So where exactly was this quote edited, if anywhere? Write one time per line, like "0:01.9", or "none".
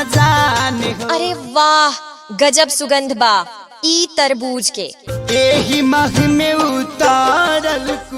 none